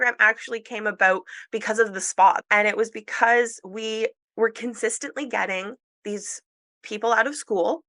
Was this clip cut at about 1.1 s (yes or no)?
no